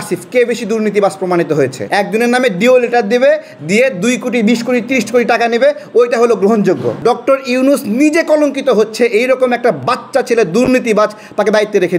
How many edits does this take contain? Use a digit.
2